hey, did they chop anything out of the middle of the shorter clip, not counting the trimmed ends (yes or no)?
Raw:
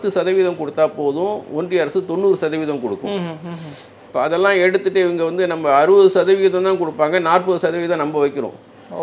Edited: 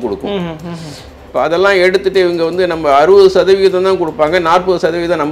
no